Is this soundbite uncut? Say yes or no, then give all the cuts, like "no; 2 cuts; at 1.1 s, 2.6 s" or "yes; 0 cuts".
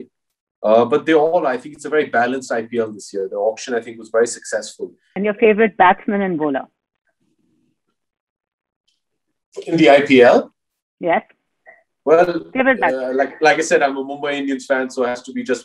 no; 1 cut; at 5.0 s